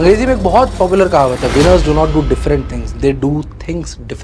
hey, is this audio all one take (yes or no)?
yes